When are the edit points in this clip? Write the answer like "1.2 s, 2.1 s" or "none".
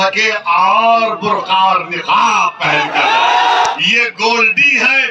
3.7 s